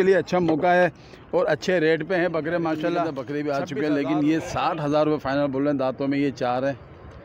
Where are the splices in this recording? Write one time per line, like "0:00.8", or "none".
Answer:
0:03.2